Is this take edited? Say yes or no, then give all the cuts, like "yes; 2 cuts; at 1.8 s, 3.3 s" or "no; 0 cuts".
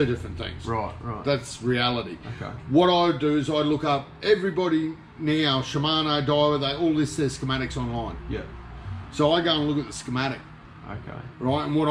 no; 0 cuts